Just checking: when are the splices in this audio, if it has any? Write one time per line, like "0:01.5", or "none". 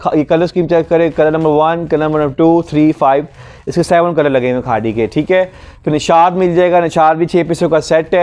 none